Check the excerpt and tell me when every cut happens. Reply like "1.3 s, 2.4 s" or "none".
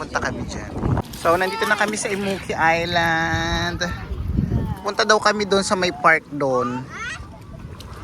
1.0 s